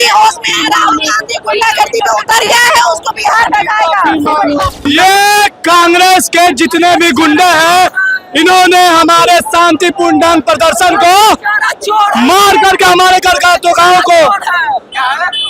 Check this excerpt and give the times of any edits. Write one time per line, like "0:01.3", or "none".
0:04.8